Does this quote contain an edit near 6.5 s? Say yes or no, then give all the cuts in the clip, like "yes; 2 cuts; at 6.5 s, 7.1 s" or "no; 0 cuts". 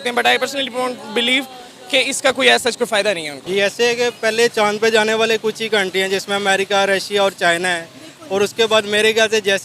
no; 1 cut; at 3.5 s